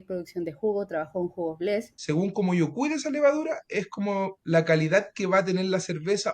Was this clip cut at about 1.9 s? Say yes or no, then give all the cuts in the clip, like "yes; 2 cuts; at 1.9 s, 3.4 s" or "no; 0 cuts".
yes; 1 cut; at 1.9 s